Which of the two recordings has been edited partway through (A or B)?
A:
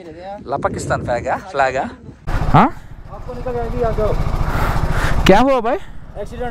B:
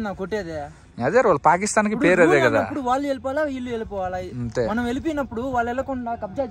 A